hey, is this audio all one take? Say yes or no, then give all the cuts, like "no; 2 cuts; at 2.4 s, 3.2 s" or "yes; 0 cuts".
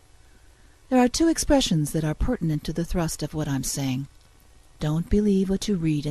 no; 1 cut; at 1.9 s